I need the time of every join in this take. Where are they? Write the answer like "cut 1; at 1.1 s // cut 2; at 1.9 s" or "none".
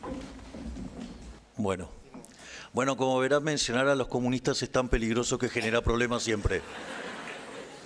cut 1; at 1.3 s